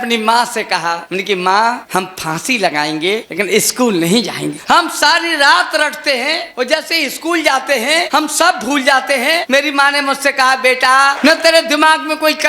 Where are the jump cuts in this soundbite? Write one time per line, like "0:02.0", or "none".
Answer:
0:01.1
0:01.8
0:03.3
0:04.6
0:06.5
0:08.1
0:09.4
0:11.2